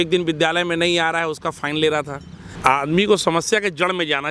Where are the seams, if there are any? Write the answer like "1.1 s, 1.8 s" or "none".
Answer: 2.5 s